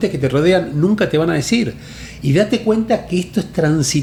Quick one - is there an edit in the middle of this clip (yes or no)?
no